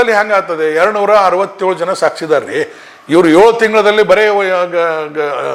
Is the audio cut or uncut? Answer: uncut